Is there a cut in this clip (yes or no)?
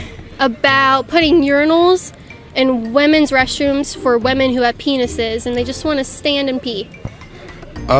no